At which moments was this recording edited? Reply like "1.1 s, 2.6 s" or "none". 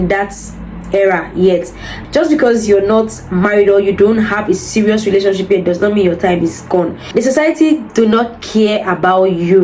2.0 s, 7.0 s